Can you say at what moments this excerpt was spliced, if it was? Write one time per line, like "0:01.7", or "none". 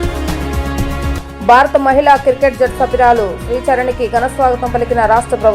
0:01.0